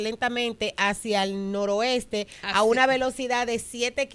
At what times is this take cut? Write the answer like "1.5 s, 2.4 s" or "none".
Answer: none